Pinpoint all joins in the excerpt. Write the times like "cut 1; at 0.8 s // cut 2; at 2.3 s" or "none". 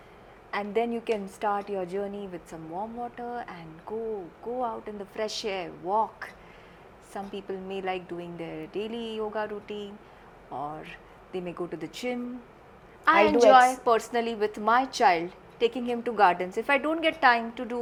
none